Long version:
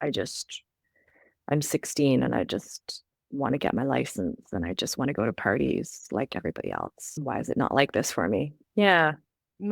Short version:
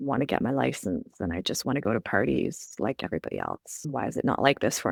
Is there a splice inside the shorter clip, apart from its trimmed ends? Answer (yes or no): no